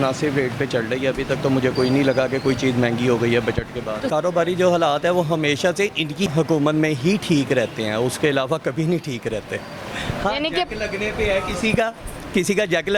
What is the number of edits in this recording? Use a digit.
0